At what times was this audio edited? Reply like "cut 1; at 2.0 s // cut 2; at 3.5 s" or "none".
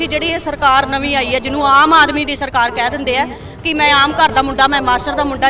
none